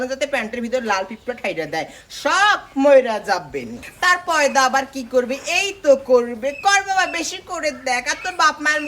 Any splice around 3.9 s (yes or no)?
yes